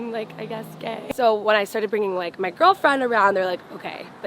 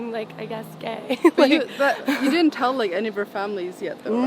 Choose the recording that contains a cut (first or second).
first